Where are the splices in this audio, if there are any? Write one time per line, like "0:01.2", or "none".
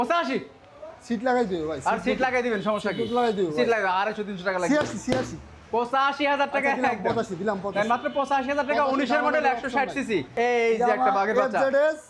0:10.3